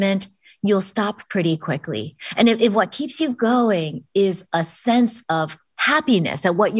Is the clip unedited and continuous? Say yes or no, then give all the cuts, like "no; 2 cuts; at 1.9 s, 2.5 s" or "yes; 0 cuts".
yes; 0 cuts